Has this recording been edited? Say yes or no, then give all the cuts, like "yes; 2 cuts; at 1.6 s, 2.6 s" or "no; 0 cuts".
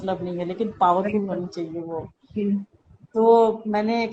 no; 0 cuts